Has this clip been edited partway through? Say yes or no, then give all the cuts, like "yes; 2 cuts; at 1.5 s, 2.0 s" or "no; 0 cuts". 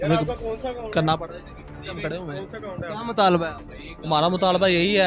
no; 0 cuts